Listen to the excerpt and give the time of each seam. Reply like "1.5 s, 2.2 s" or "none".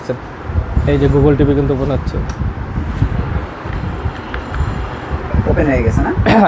3.7 s

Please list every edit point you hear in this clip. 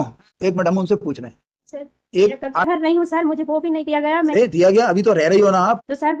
2.6 s

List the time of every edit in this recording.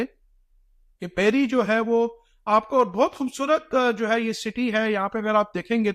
none

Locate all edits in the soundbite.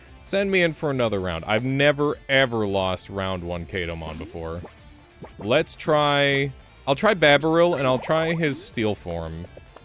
5.4 s, 6.7 s

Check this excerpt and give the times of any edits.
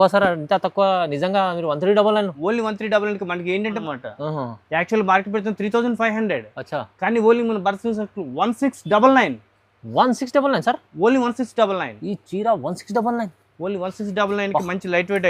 3.8 s

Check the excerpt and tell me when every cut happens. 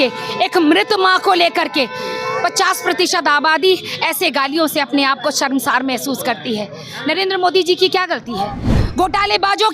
8.8 s

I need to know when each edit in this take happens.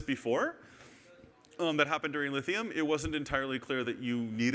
2.3 s

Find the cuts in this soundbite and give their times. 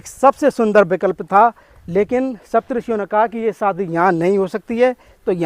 none

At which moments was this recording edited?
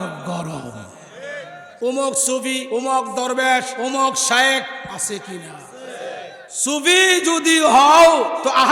1.6 s, 2.6 s, 3.7 s, 6.4 s

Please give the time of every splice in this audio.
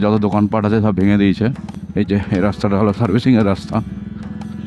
1.7 s

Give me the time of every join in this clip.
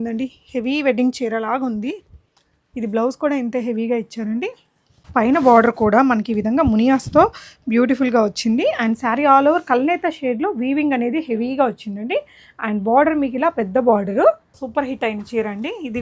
4.9 s, 14.6 s

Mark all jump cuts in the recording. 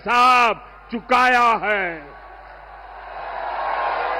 none

